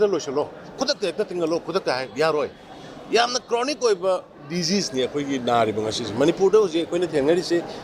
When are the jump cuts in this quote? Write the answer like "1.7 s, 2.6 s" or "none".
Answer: none

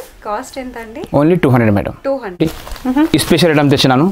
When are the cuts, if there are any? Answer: 2.3 s

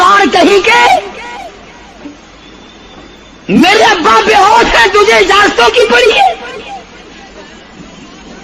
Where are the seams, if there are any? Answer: none

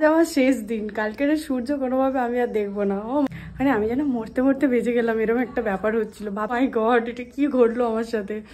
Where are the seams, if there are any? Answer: 3.3 s, 6.5 s

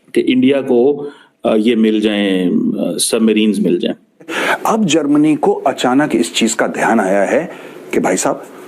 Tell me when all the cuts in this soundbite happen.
4.4 s

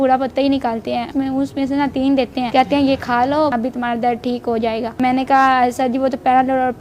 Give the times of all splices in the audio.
1.1 s, 2.5 s, 3.5 s, 5.0 s

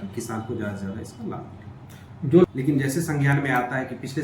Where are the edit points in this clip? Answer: 2.4 s

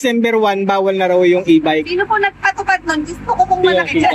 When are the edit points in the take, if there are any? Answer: none

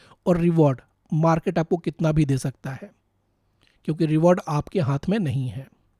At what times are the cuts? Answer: none

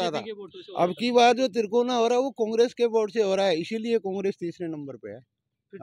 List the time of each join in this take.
none

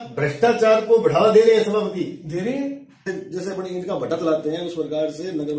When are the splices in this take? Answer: 3.1 s

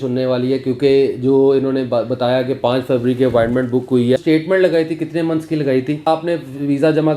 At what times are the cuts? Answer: 4.2 s, 6.1 s

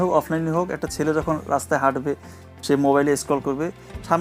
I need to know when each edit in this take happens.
none

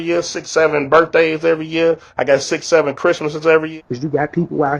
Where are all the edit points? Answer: 3.7 s

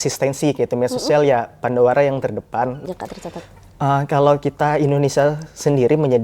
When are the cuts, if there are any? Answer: 2.8 s

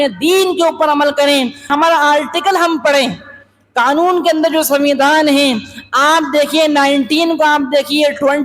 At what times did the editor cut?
1.6 s

